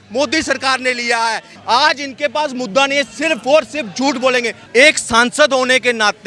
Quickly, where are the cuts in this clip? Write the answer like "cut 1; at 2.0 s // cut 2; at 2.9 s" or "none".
cut 1; at 1.5 s // cut 2; at 4.6 s